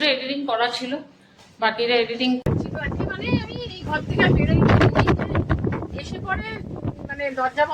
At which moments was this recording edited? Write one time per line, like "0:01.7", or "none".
0:02.4